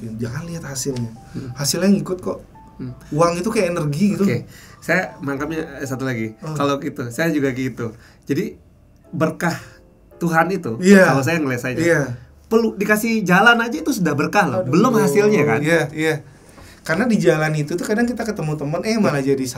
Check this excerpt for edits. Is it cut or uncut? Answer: uncut